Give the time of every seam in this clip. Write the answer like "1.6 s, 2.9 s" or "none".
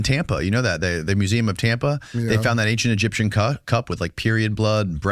2.1 s